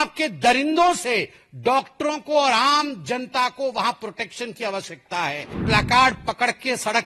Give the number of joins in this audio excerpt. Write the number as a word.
one